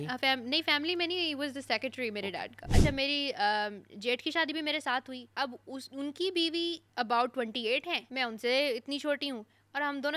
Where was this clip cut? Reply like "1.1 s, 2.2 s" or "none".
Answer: 2.7 s, 5.2 s, 6.8 s, 8.0 s

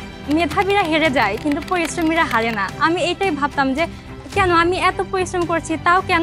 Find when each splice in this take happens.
none

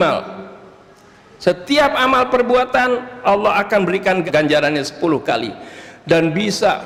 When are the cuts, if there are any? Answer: none

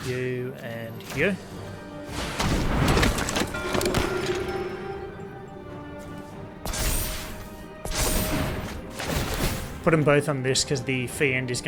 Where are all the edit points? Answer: none

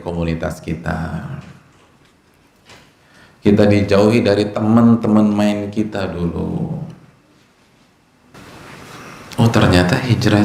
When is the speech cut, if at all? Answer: 8.3 s

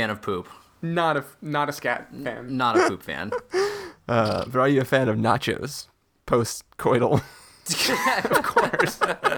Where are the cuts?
none

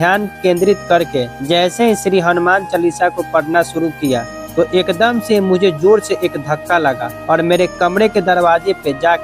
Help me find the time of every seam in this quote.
1.3 s, 4.4 s, 7.1 s

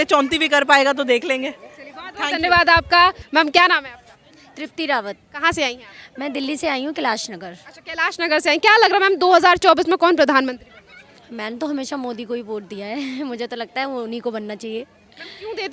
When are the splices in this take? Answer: none

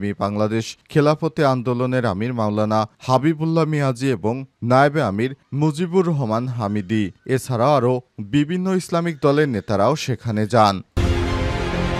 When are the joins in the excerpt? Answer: 10.9 s

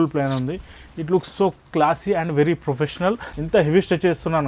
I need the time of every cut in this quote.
3.3 s

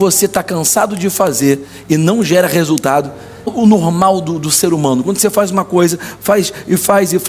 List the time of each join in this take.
3.5 s

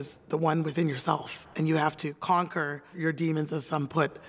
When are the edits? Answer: 1.4 s, 3.0 s

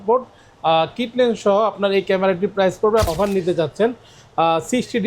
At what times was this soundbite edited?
3.1 s

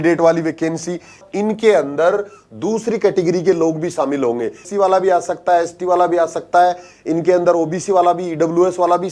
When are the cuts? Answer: 1.2 s, 4.6 s

